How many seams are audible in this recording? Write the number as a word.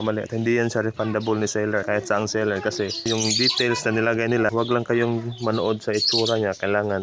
three